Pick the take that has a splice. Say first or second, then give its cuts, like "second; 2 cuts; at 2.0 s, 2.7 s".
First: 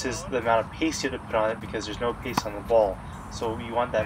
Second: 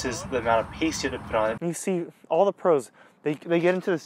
second; 1 cut; at 1.6 s